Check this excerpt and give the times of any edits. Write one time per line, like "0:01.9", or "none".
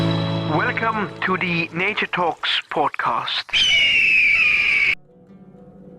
0:05.1